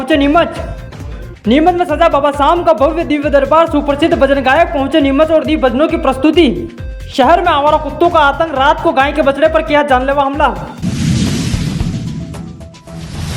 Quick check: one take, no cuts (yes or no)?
no